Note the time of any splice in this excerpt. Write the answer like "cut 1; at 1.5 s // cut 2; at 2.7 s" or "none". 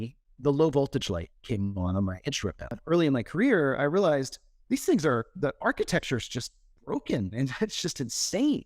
cut 1; at 2.7 s

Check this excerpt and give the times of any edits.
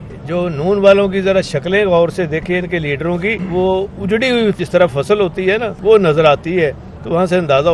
cut 1; at 3.4 s // cut 2; at 4.6 s // cut 3; at 5.7 s

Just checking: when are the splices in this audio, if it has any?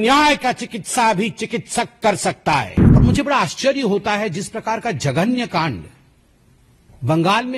cut 1; at 2.8 s

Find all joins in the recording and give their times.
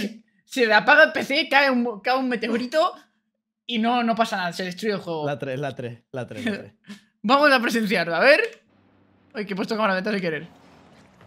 none

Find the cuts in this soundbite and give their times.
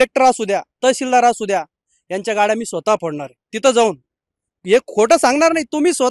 none

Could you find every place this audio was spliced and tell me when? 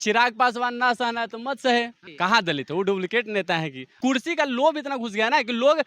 cut 1; at 2.0 s // cut 2; at 3.8 s

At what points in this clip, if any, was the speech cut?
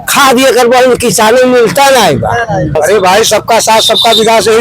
cut 1; at 2.8 s

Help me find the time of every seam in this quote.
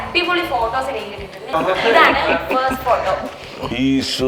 cut 1; at 1.5 s

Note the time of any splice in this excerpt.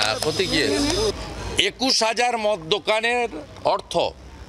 cut 1; at 1.1 s

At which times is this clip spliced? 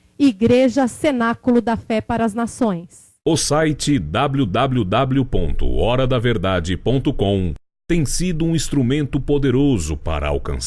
cut 1; at 3.0 s

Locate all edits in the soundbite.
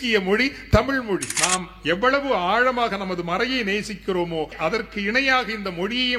cut 1; at 1.3 s // cut 2; at 4.5 s

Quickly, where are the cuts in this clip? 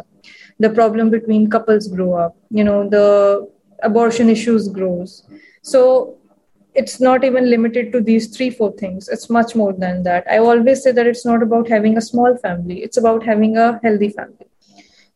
none

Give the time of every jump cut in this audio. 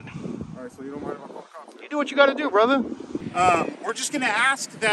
cut 1; at 3.1 s

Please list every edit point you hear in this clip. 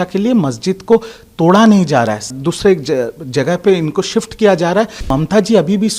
cut 1; at 2.3 s // cut 2; at 5.1 s

